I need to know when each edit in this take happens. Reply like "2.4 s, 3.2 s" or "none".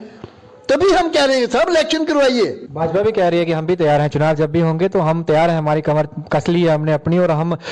2.6 s

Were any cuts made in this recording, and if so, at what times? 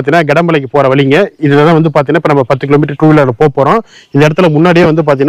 none

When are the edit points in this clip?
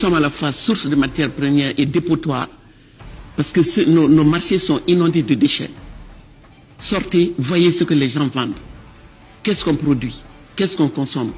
none

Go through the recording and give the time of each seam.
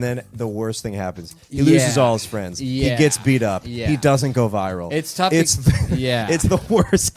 none

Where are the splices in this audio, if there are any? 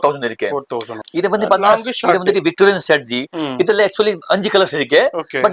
0.9 s

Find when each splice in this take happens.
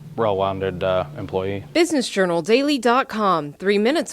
1.6 s

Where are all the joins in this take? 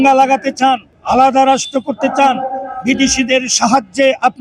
none

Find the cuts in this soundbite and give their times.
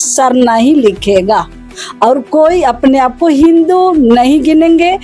none

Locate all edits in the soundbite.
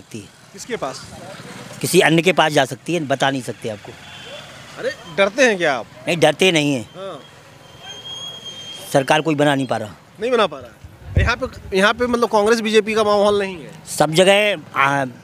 none

